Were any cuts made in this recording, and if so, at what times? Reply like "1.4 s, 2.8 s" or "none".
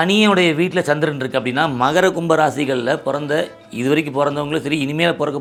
none